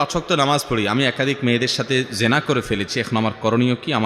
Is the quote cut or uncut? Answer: uncut